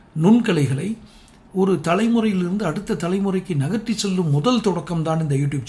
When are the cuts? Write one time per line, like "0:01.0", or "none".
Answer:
none